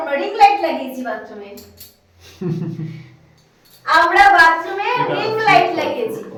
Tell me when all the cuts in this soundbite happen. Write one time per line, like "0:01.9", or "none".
none